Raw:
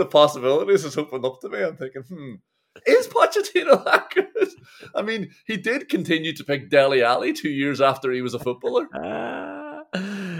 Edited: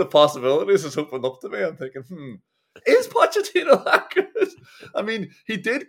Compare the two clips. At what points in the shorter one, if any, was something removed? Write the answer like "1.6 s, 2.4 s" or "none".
none

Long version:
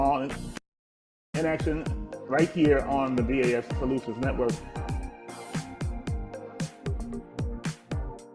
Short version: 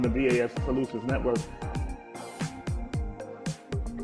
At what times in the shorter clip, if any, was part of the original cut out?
none

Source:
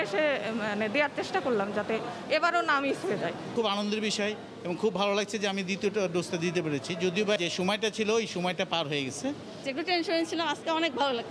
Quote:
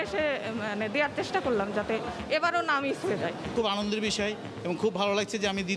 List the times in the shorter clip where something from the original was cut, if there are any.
none

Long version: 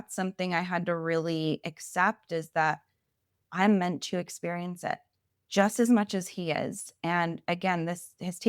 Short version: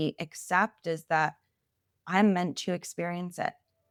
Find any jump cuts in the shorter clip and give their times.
none

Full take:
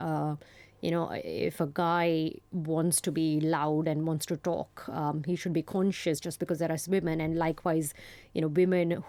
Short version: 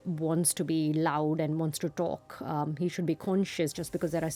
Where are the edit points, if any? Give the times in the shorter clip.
none

